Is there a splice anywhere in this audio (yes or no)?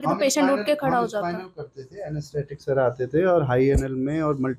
no